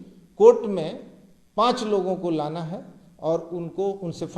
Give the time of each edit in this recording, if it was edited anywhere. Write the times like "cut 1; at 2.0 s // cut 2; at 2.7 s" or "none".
none

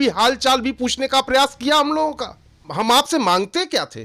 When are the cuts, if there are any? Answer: cut 1; at 2.7 s

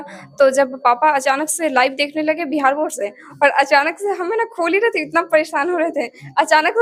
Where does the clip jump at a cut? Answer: none

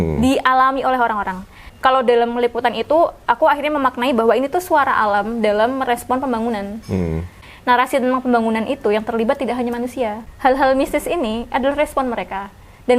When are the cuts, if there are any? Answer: cut 1; at 1.7 s // cut 2; at 7.4 s // cut 3; at 10.2 s

